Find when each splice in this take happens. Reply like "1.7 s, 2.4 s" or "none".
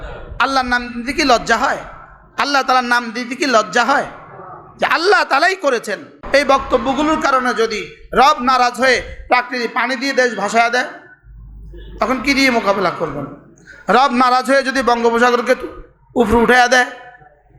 6.2 s